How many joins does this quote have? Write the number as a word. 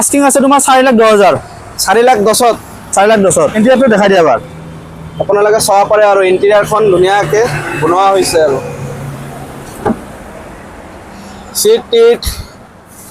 one